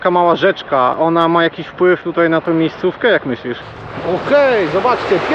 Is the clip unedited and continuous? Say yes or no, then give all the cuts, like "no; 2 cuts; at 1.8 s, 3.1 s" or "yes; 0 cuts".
no; 1 cut; at 3.6 s